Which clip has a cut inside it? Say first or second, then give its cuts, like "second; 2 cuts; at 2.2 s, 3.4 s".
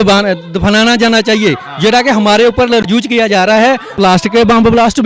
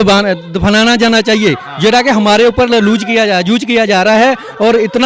first; 2 cuts; at 2.8 s, 3.9 s